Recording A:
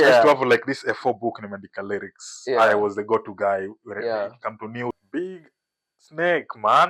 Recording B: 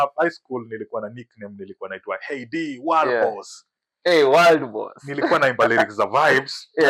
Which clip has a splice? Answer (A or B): A